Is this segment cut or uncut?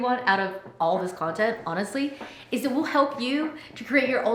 uncut